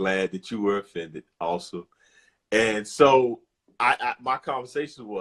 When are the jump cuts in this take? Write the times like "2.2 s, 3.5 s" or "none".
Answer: none